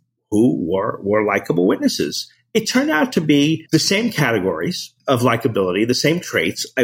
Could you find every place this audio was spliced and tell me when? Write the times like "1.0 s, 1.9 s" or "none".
3.6 s, 4.9 s